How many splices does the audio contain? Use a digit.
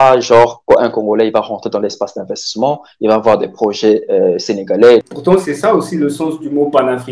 1